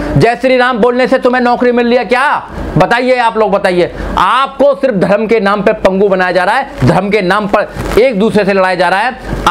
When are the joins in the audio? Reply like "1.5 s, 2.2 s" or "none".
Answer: none